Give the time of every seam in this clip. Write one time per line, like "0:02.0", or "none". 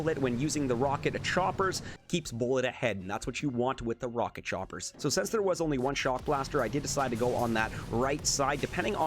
0:01.9
0:04.8

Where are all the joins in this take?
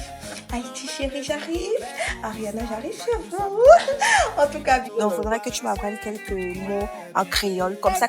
0:04.9

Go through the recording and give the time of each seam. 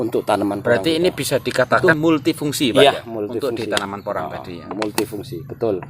0:01.8

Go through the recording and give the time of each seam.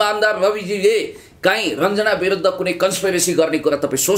none

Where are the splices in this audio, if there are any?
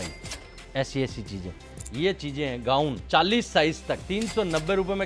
0:01.8
0:03.0
0:04.0

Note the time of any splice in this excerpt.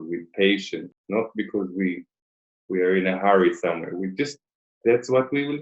none

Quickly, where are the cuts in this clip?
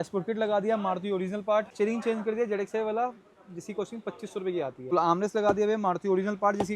0:01.7
0:04.9

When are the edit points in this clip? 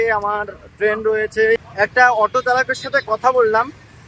0:01.7

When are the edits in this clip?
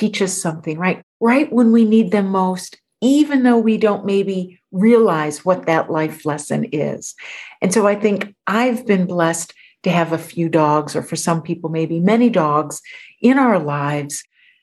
0:01.0

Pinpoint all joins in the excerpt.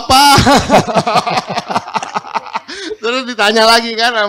none

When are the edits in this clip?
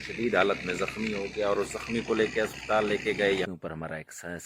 0:03.5

